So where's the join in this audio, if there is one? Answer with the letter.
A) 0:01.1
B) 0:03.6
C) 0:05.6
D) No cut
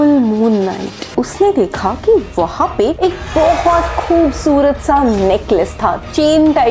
A